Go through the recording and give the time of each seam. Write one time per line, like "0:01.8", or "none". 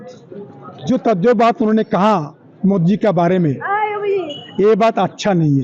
none